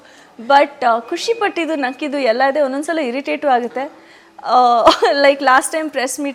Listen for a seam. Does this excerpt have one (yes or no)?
no